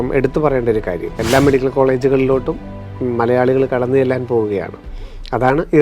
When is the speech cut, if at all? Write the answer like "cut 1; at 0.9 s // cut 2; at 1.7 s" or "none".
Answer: cut 1; at 1.2 s